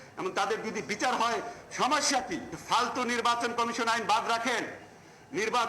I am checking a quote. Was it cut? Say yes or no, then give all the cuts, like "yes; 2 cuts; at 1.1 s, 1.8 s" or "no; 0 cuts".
yes; 1 cut; at 2.5 s